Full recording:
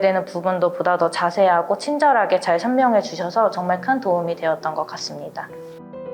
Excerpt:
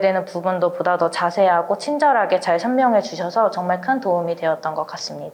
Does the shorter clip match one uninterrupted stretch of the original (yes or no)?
yes